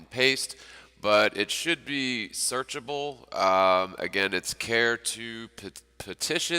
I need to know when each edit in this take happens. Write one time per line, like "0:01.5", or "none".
0:04.0

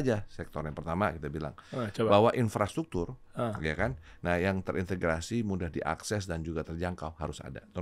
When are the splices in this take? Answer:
none

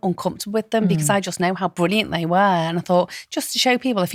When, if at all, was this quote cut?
none

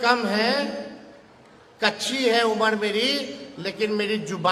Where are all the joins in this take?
none

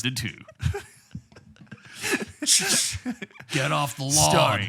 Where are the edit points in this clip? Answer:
none

